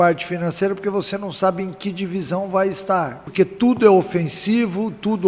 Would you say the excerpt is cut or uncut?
cut